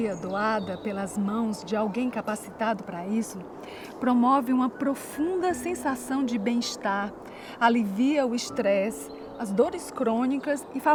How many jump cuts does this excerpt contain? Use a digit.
0